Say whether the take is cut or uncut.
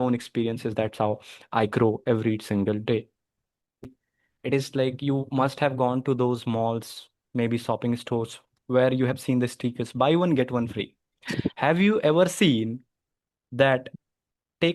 cut